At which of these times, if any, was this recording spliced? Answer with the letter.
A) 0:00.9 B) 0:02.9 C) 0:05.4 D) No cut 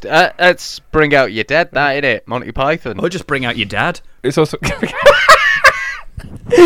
B